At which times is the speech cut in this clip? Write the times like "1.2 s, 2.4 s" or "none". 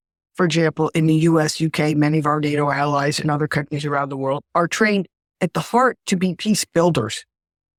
none